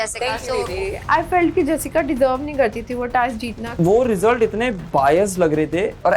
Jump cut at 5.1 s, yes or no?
no